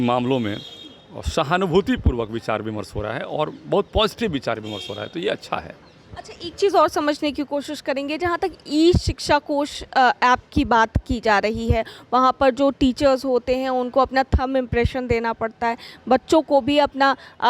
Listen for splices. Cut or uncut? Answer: uncut